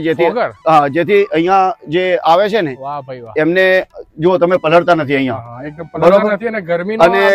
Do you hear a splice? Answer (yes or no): no